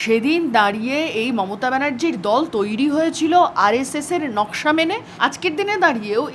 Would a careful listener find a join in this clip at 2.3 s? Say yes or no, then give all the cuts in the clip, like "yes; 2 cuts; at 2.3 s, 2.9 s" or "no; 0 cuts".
no; 1 cut; at 5.1 s